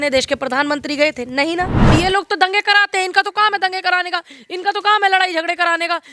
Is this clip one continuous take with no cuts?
no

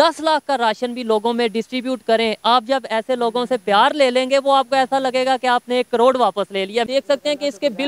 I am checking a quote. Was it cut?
yes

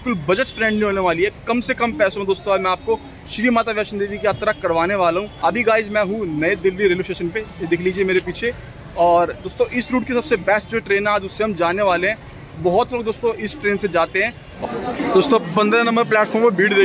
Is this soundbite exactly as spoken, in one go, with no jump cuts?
no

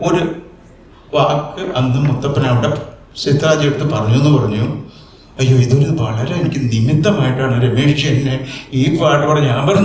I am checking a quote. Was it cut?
no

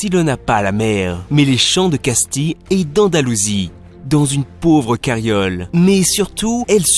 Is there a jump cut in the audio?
no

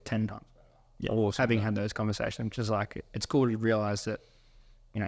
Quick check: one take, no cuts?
yes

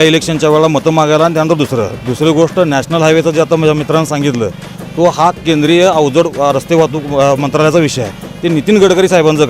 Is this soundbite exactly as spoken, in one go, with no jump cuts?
yes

